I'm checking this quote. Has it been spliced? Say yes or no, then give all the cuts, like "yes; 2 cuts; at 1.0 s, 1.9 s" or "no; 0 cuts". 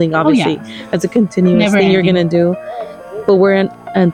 no; 0 cuts